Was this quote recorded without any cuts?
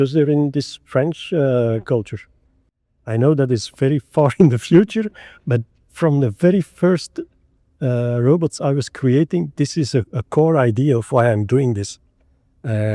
no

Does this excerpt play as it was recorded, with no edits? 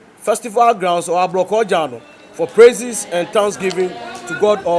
yes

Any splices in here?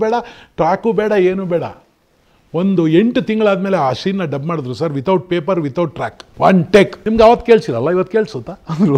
yes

